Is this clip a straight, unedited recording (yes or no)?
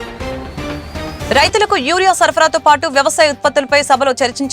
no